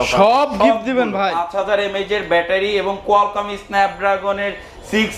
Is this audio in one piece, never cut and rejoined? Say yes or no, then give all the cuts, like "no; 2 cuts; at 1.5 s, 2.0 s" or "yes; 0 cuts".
no; 1 cut; at 1.4 s